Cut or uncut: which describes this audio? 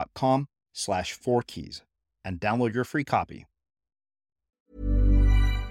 cut